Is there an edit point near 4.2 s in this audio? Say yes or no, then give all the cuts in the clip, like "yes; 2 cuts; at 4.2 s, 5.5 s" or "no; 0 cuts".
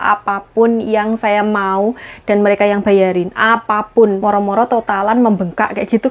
yes; 1 cut; at 4.2 s